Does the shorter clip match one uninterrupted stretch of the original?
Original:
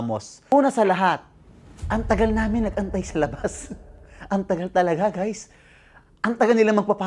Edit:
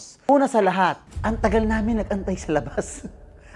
no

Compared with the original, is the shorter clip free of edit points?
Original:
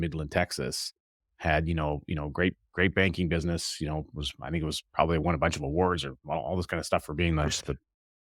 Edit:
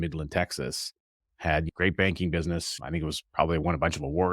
no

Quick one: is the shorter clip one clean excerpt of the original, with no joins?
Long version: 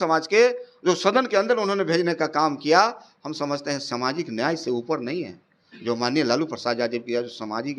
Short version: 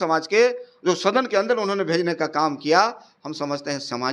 yes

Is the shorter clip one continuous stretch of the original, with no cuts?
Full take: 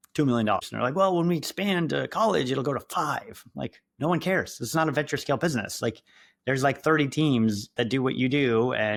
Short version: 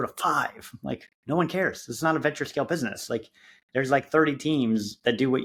yes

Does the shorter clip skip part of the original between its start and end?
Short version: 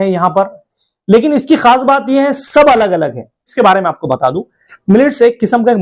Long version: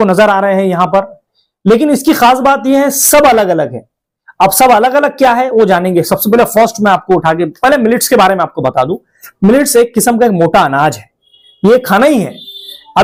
yes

